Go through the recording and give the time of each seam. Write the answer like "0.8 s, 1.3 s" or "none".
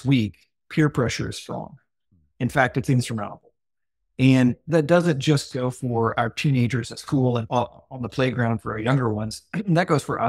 4.6 s, 7.5 s